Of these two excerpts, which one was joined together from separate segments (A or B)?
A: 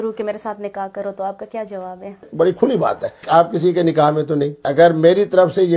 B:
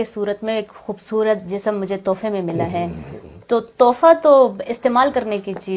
A